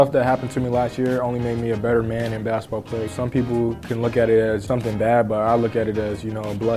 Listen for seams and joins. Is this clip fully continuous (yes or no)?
no